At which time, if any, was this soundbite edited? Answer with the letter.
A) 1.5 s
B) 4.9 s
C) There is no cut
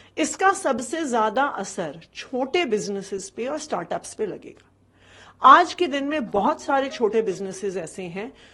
C